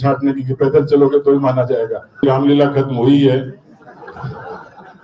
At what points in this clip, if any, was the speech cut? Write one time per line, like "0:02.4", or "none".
0:02.2